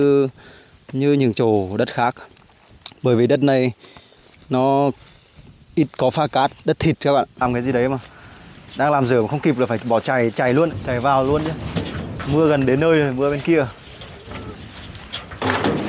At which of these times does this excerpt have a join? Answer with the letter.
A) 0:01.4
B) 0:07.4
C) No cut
B